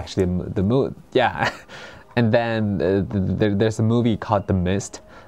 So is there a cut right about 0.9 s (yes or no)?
no